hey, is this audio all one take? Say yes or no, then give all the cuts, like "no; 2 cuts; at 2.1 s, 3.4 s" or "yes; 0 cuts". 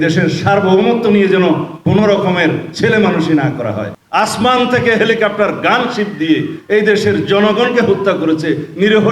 no; 1 cut; at 3.9 s